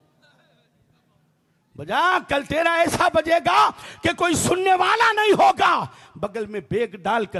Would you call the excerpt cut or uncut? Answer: uncut